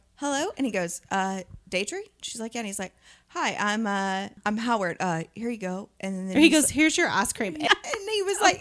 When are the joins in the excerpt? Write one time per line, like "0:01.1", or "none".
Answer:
0:04.4
0:07.7